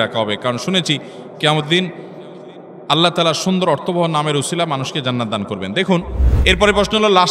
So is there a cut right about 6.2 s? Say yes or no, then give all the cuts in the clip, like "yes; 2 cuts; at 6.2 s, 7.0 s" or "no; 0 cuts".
yes; 1 cut; at 6.2 s